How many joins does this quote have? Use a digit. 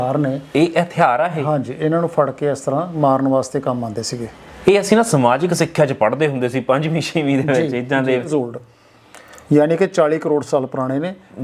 1